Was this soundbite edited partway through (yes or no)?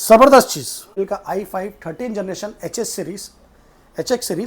yes